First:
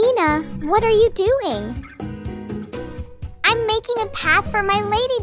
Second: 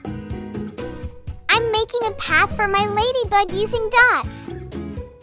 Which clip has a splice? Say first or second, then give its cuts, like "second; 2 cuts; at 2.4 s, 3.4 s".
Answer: second; 1 cut; at 4.2 s